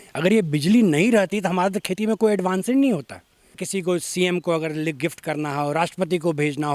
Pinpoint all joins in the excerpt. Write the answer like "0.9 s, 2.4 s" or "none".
3.7 s

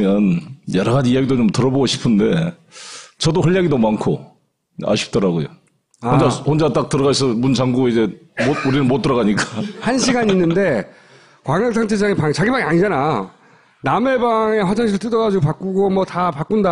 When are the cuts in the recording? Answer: 12.1 s

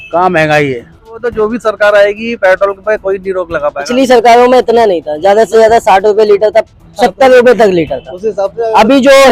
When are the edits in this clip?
1.3 s

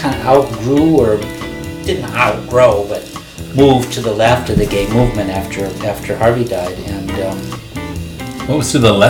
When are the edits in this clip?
none

